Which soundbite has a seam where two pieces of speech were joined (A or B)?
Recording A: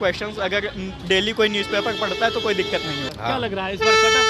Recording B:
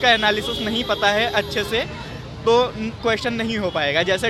A